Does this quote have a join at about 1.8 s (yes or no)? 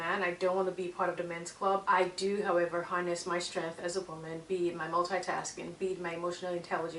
yes